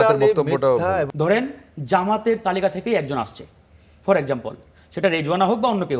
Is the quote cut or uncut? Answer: cut